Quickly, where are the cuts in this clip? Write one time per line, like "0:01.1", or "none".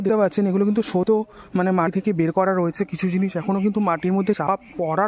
none

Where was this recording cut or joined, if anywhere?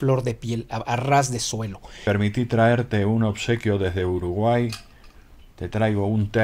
0:02.0

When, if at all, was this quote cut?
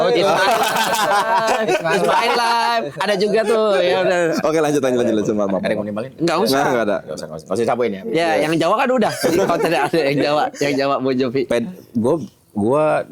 none

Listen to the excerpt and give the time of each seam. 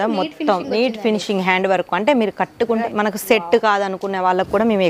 0:02.8

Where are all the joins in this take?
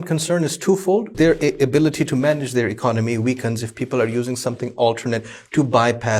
0:01.1

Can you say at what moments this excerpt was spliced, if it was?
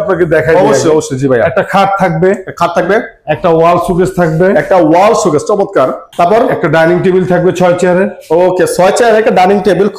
none

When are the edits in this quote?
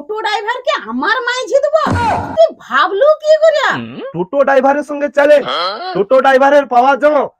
none

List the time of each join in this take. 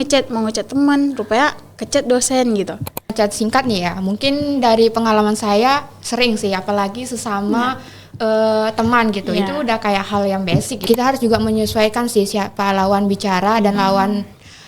0:03.1
0:10.7

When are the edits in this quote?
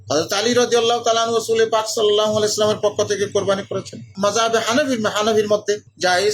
0:04.1

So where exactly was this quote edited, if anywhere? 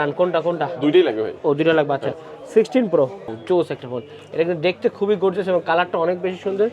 0:03.3

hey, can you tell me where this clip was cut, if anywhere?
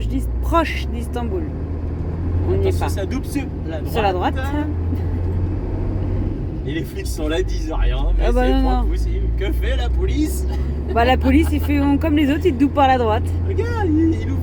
none

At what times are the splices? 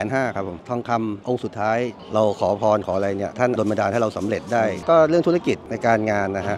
0:02.0

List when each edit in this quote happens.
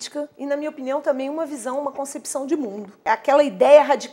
0:03.0

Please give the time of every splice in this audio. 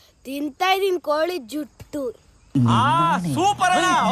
0:02.3

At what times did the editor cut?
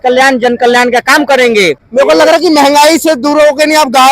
0:01.8

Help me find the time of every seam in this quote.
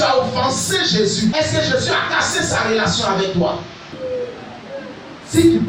0:01.3
0:04.0

